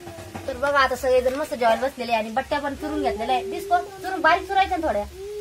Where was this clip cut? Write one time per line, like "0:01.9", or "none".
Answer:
none

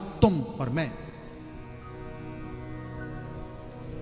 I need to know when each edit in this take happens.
none

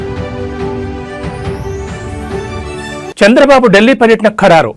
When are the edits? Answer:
0:02.5

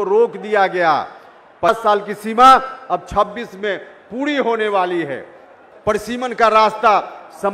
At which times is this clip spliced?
0:01.7
0:05.6

